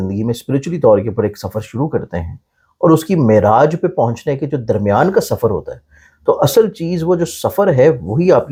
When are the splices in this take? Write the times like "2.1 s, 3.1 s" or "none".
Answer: none